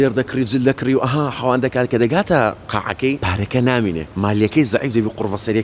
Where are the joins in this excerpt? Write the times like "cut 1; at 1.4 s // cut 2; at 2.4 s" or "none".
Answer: cut 1; at 3.2 s // cut 2; at 4.1 s